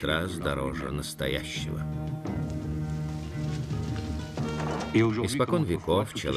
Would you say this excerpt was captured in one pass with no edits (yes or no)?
no